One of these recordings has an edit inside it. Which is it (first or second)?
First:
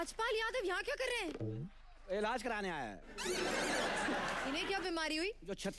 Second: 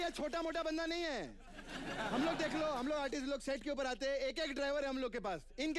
first